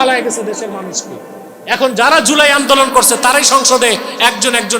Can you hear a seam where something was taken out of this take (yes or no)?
no